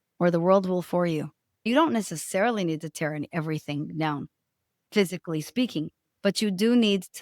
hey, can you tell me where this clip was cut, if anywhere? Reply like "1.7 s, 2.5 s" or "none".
1.7 s